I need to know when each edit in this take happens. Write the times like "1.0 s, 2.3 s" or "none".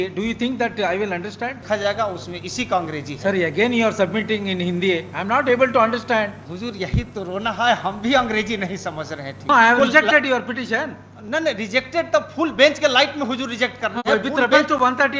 1.6 s, 6.5 s, 9.5 s